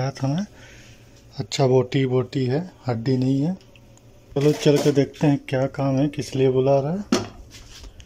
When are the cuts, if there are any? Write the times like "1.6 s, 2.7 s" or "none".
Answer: 4.4 s

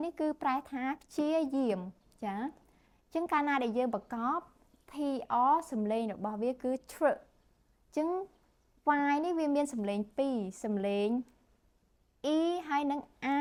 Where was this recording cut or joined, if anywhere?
none

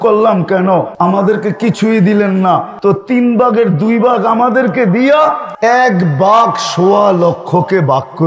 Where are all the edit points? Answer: 0.9 s, 2.7 s, 5.5 s

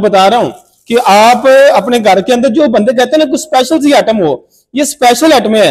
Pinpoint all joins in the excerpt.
none

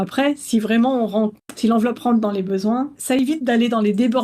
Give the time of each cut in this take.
3.0 s

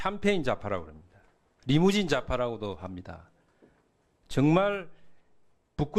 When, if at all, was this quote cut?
none

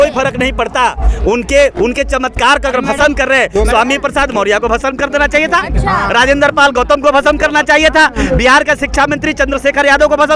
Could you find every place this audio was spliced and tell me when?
none

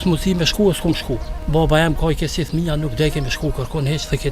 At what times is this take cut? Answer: 1.3 s

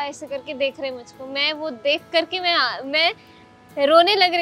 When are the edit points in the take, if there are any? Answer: none

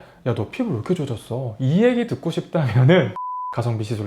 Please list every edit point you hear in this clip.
3.1 s

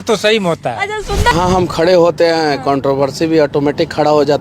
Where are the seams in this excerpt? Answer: 1.3 s

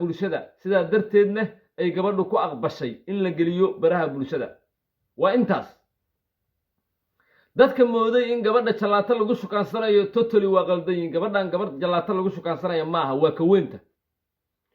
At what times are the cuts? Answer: 6.5 s

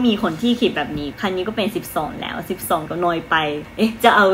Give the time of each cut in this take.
1.1 s, 3.3 s

